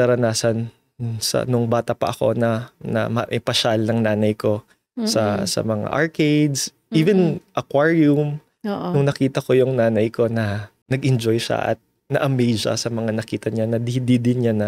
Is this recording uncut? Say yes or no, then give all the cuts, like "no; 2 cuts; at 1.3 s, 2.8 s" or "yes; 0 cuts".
yes; 0 cuts